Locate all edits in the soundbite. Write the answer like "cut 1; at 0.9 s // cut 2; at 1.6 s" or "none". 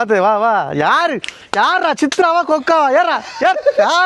none